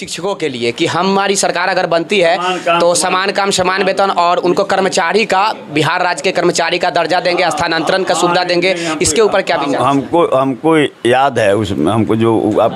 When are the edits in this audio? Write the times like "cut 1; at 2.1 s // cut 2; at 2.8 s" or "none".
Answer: none